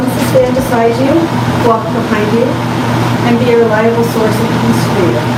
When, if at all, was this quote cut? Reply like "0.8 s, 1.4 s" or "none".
none